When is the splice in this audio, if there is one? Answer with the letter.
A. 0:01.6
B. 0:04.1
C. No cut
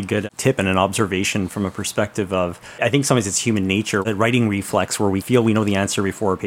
B